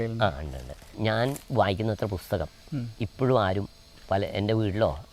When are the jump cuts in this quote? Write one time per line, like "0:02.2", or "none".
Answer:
0:00.9